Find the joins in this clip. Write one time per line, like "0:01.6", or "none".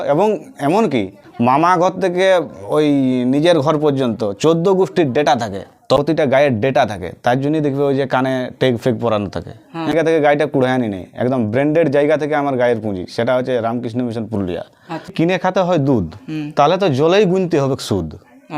0:01.2
0:06.0
0:09.9
0:15.1